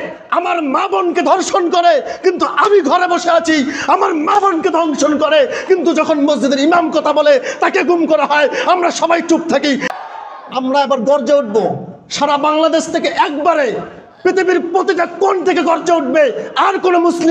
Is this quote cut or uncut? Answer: cut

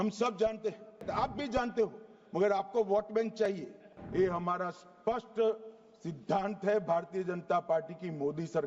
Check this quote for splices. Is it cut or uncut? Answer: cut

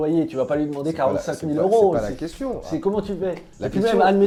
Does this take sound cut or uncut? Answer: uncut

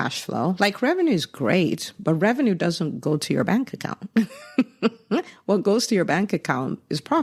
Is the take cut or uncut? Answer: uncut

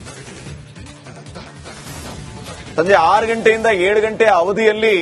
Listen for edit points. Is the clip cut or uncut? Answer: cut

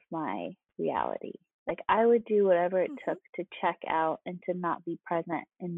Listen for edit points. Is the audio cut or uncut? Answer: uncut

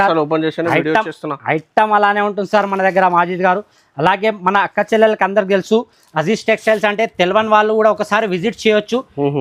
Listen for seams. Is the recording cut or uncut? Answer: uncut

